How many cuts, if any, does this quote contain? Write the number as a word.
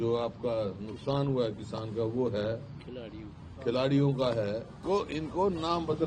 one